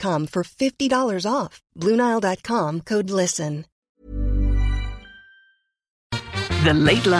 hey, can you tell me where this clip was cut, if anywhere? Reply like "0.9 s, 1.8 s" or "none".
3.7 s, 6.2 s